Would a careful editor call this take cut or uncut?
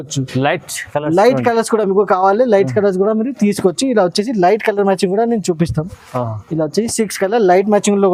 uncut